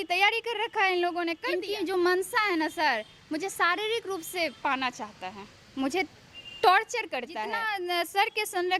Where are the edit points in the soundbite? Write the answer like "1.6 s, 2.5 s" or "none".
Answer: 1.4 s, 7.7 s

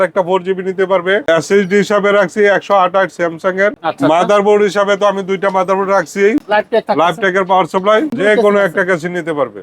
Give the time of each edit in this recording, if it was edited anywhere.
1.2 s, 3.8 s, 6.4 s, 8.2 s

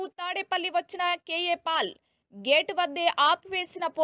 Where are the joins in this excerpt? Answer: none

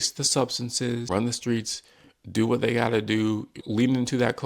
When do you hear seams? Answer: 1.0 s

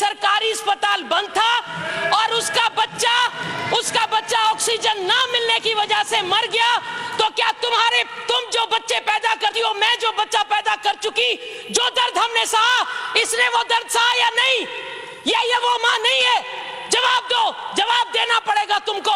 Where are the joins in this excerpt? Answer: none

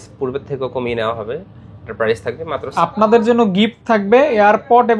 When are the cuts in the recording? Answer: 2.7 s

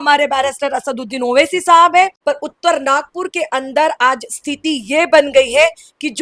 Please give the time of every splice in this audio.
2.2 s

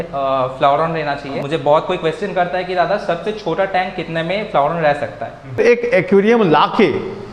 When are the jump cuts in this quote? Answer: 1.4 s, 5.6 s

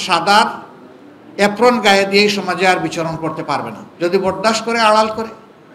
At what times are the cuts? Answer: 3.8 s

